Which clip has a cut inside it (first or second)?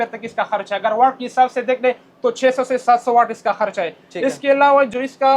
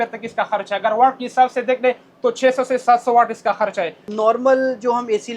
second